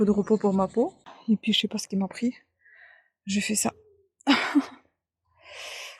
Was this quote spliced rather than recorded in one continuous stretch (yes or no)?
yes